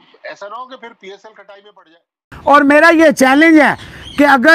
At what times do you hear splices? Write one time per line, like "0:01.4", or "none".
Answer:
0:02.2